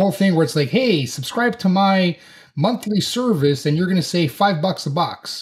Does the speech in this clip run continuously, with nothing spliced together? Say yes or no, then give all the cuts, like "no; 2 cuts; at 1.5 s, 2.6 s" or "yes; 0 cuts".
yes; 0 cuts